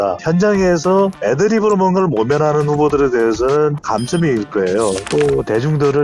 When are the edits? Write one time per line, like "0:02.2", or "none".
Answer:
0:05.1